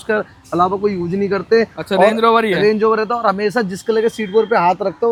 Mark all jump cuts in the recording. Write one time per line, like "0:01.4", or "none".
none